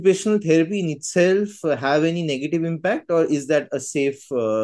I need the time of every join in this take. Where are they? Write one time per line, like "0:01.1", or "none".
none